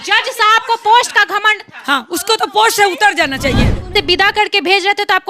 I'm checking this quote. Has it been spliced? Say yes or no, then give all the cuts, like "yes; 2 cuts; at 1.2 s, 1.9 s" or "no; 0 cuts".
yes; 1 cut; at 3.9 s